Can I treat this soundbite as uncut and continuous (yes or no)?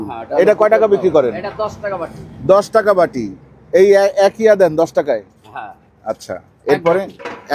yes